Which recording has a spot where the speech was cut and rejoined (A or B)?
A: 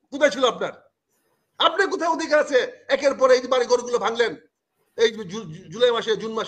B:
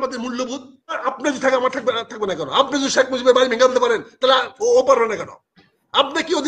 B